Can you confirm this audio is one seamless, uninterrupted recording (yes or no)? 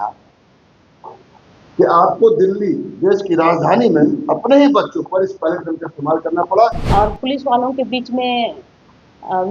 no